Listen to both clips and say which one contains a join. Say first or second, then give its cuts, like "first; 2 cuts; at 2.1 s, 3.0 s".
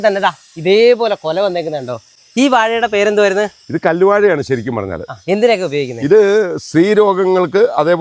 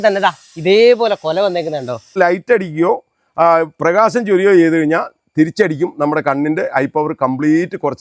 second; 1 cut; at 2.2 s